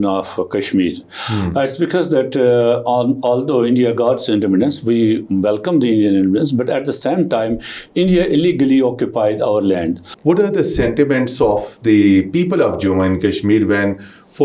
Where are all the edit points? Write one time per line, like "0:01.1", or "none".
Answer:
0:10.1

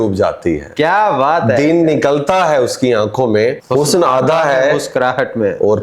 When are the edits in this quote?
0:03.6

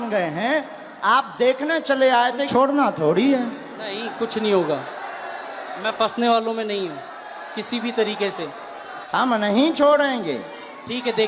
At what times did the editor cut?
0:02.5
0:08.9

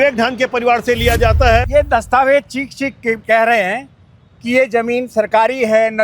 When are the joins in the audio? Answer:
0:01.7
0:03.2

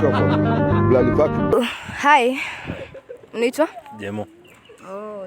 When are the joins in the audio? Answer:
0:01.5

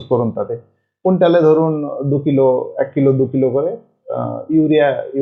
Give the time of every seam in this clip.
none

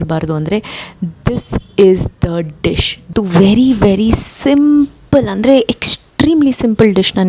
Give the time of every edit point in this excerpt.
0:03.1

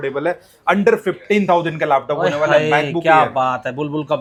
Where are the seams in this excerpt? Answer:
none

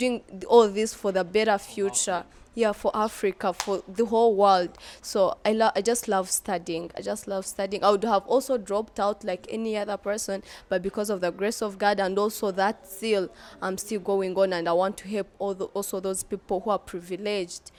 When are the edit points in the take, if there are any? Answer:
none

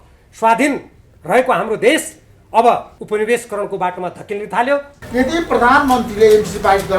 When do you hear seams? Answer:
0:02.9
0:05.0

